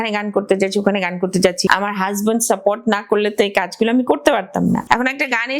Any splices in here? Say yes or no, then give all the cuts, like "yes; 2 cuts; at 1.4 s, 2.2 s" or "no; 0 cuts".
yes; 2 cuts; at 1.6 s, 4.8 s